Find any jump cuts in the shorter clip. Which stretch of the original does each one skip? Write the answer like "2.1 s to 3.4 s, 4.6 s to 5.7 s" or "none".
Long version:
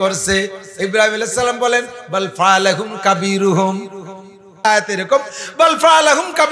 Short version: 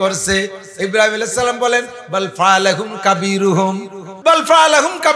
4.0 s to 5.4 s